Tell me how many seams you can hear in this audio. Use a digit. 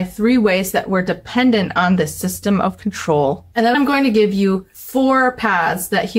1